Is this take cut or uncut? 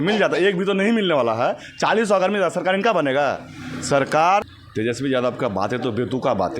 cut